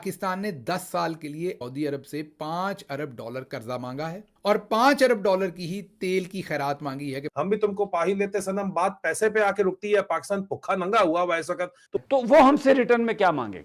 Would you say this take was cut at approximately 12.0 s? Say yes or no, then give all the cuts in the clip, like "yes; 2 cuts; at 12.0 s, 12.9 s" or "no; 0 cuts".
yes; 3 cuts; at 1.6 s, 7.3 s, 12.0 s